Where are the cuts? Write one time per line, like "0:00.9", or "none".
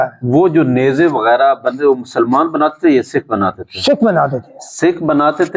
none